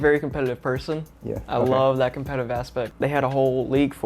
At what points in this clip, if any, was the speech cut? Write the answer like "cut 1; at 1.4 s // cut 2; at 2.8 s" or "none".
cut 1; at 2.9 s

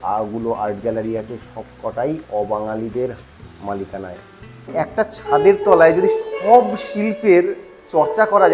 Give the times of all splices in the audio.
cut 1; at 4.7 s

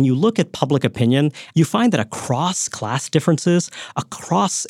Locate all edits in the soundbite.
cut 1; at 1.4 s

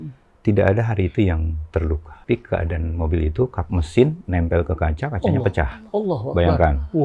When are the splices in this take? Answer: cut 1; at 2.1 s

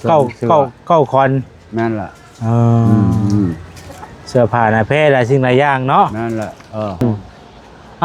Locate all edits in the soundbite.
cut 1; at 7.0 s

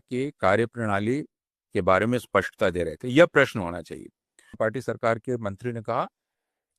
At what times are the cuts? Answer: cut 1; at 4.6 s

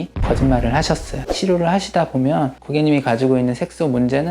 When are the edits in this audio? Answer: cut 1; at 1.3 s

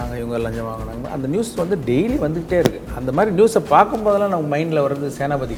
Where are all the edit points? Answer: none

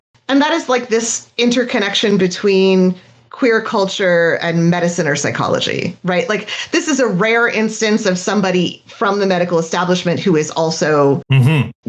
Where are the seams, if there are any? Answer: none

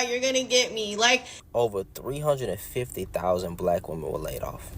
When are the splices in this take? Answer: cut 1; at 1.4 s

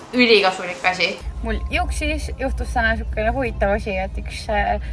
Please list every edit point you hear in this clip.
cut 1; at 1.2 s

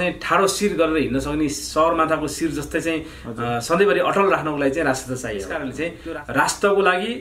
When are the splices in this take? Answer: cut 1; at 5.6 s

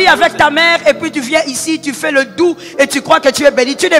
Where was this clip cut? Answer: none

